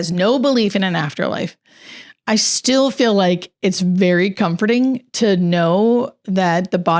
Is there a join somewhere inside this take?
no; 0 cuts

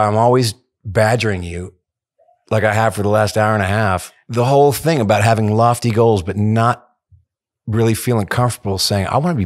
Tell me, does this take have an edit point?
yes; 1 cut; at 4.2 s

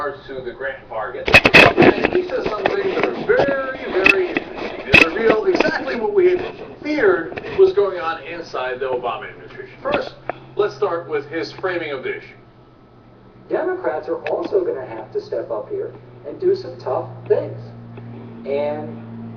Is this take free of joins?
yes; 0 cuts

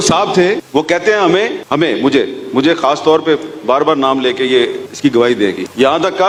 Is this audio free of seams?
yes; 0 cuts

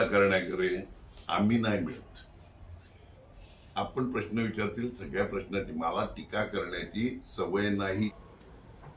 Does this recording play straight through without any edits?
no; 1 cut; at 8.1 s

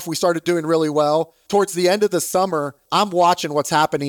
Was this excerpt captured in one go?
no; 2 cuts; at 1.4 s, 2.8 s

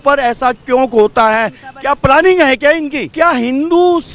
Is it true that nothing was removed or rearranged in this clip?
no; 1 cut; at 3.0 s

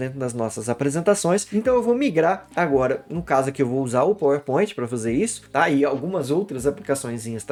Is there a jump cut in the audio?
no; 0 cuts

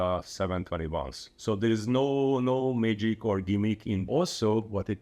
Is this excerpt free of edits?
no; 1 cut; at 4.0 s

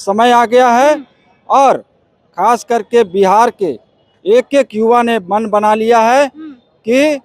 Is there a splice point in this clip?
no; 0 cuts

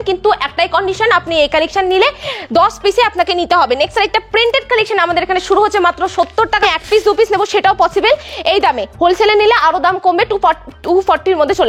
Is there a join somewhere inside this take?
yes; 1 cut; at 6.6 s

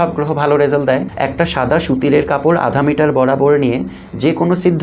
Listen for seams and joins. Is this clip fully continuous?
no; 1 cut; at 1.1 s

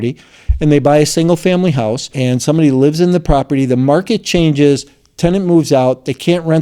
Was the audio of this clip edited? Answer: yes; 1 cut; at 2.1 s

